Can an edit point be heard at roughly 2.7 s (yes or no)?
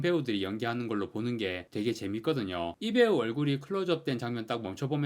yes